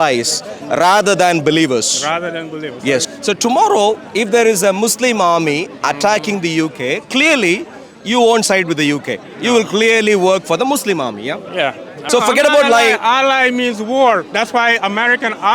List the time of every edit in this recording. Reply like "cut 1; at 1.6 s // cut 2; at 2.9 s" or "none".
cut 1; at 3.1 s // cut 2; at 11.9 s

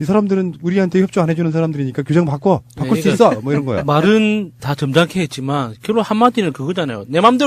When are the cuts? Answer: none

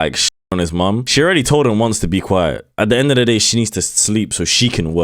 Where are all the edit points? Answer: cut 1; at 1.1 s

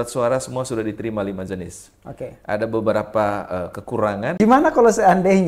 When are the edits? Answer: cut 1; at 4.3 s

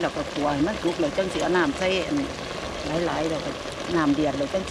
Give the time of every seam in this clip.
none

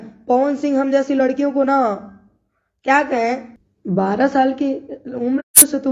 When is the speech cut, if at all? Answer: cut 1; at 3.4 s

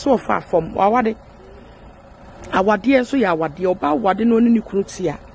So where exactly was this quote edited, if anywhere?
none

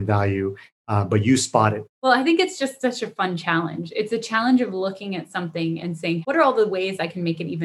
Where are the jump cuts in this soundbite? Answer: cut 1; at 1.9 s

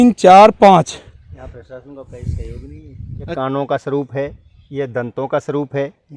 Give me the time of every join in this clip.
cut 1; at 3.3 s

